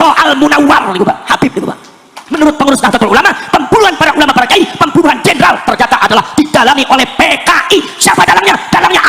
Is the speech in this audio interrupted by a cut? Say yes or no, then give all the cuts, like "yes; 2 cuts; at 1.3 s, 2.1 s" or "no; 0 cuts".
yes; 1 cut; at 2.3 s